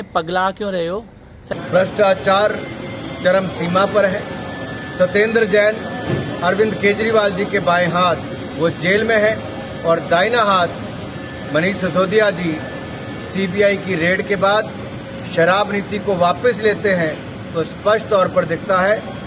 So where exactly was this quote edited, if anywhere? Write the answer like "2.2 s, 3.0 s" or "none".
1.4 s